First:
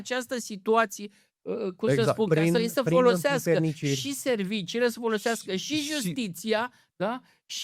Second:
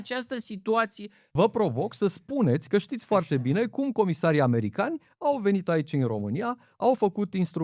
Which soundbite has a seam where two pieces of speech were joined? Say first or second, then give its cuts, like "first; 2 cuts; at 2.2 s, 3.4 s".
second; 1 cut; at 1.2 s